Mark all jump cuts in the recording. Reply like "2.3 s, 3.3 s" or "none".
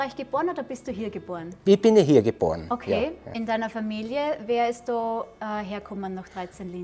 3.3 s